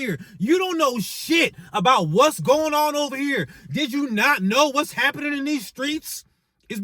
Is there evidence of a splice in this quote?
no; 0 cuts

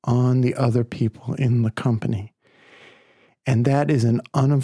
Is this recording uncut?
yes; 0 cuts

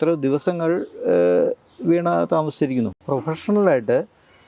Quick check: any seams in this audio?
yes; 1 cut; at 3.0 s

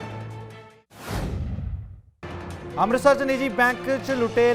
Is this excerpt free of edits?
yes; 0 cuts

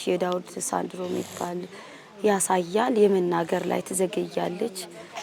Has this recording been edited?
no; 0 cuts

